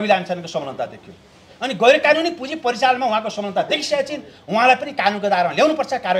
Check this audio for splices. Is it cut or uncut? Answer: uncut